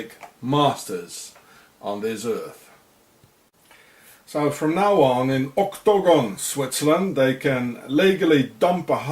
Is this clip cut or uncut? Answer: cut